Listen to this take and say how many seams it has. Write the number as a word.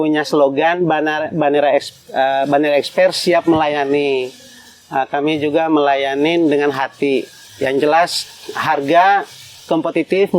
zero